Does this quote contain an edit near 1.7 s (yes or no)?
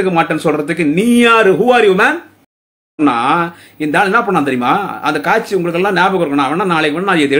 no